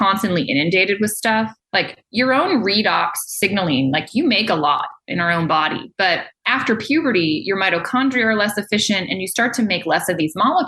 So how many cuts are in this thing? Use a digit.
2